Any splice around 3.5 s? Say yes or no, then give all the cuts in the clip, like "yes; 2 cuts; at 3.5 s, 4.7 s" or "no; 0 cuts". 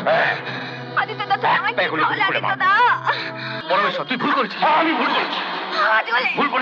yes; 1 cut; at 3.5 s